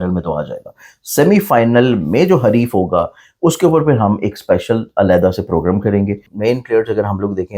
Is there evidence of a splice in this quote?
yes; 1 cut; at 6.2 s

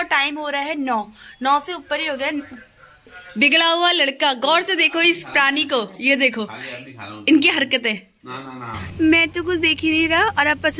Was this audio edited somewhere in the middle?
yes; 2 cuts; at 3.2 s, 8.8 s

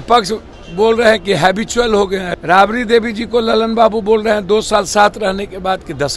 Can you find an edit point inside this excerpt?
yes; 1 cut; at 2.2 s

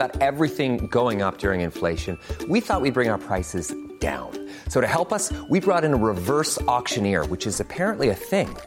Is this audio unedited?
yes; 0 cuts

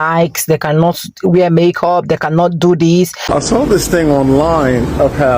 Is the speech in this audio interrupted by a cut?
yes; 1 cut; at 3.2 s

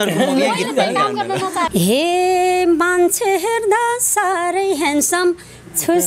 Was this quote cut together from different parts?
yes; 1 cut; at 1.7 s

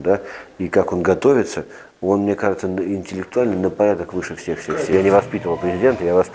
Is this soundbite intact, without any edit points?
no; 1 cut; at 4.9 s

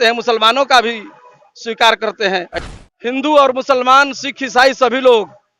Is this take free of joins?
no; 1 cut; at 2.5 s

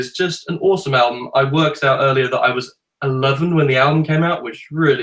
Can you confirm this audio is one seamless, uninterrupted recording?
yes; 0 cuts

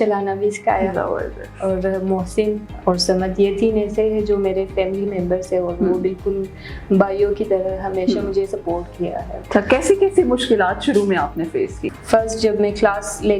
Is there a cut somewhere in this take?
yes; 3 cuts; at 2.7 s, 9.3 s, 11.9 s

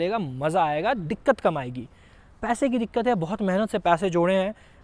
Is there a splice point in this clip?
no; 0 cuts

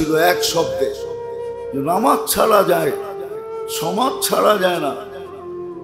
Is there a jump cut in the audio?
yes; 1 cut; at 4.9 s

